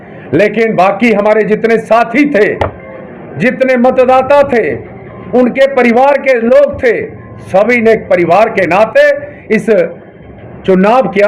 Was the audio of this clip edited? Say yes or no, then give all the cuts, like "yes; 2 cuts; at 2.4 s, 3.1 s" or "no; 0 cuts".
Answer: no; 0 cuts